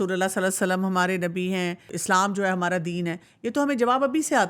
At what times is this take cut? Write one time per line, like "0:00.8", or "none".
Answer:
0:01.9